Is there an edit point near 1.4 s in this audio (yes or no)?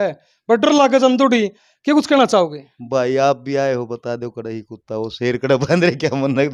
no